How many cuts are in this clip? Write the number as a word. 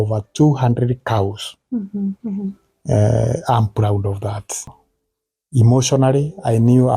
one